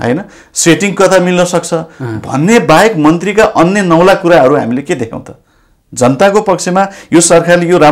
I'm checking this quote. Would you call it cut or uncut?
uncut